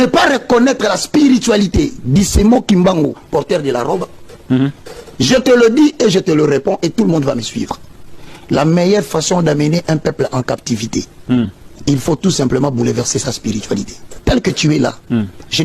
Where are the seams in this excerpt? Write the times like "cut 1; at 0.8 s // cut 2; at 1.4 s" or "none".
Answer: cut 1; at 14.0 s